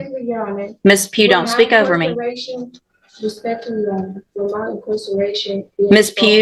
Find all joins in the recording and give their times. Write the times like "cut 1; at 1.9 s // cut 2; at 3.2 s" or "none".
none